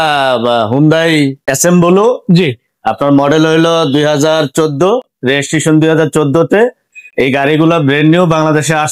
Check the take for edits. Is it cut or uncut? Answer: cut